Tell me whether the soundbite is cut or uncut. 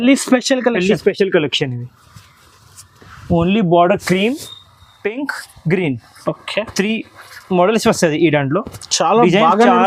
uncut